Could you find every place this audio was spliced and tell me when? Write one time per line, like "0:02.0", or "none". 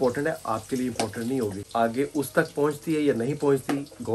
0:01.6